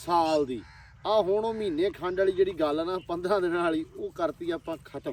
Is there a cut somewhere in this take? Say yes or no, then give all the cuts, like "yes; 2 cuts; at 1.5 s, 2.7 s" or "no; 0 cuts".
no; 0 cuts